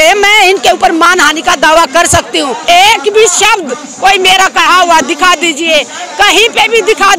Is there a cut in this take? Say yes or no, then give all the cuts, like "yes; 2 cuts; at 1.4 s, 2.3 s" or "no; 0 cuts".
yes; 1 cut; at 2.6 s